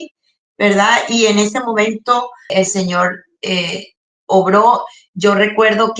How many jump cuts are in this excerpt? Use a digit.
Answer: 1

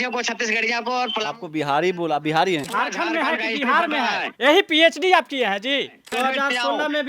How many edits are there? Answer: 2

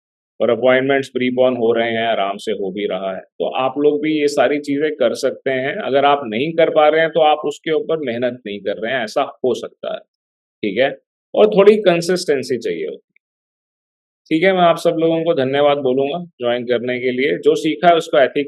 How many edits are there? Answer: 0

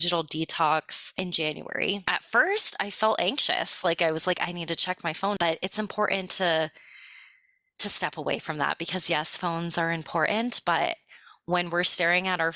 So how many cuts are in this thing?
3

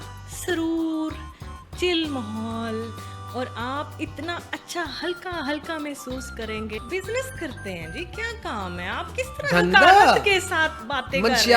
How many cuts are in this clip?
1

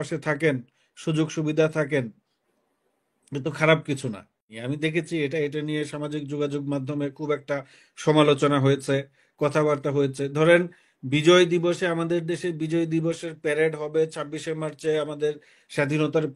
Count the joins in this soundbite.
1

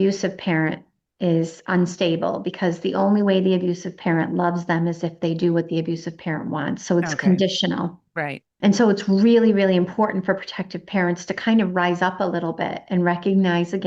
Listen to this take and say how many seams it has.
0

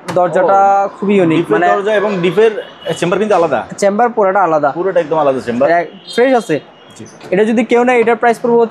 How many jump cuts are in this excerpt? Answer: 1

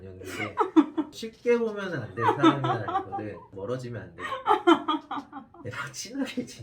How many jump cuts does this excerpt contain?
0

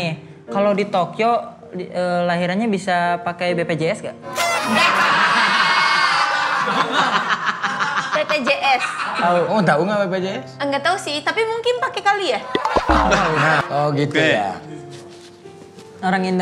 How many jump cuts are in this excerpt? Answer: 1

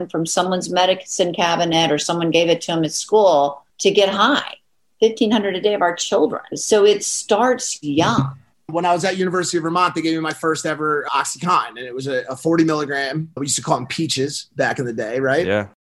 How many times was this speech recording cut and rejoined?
4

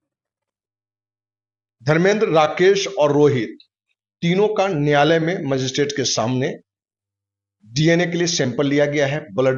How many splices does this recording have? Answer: 0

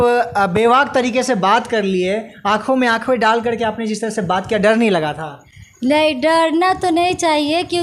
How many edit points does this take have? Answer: 0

